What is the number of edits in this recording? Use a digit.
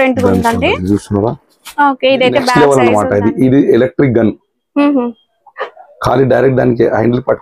1